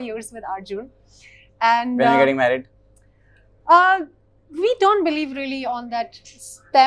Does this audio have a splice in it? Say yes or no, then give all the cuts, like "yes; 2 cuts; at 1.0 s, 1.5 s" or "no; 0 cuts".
no; 0 cuts